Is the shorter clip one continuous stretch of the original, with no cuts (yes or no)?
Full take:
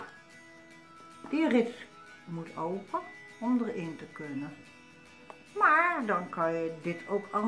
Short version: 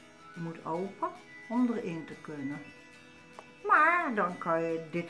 yes